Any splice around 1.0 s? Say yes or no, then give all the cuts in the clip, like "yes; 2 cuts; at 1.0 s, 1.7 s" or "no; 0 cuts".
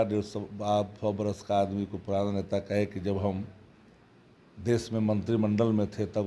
no; 0 cuts